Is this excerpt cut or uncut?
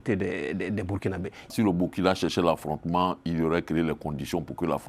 cut